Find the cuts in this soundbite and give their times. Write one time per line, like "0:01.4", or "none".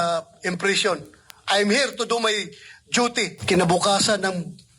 0:03.4